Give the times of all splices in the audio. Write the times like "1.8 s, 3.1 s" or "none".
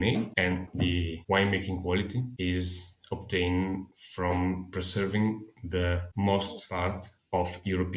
6.6 s